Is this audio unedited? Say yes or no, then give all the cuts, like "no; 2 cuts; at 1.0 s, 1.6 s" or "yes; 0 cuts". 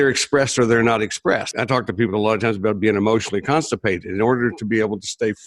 no; 1 cut; at 1.5 s